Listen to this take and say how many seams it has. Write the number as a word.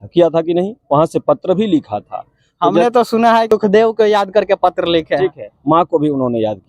one